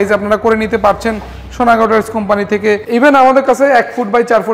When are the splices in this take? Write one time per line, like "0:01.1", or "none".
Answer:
0:02.8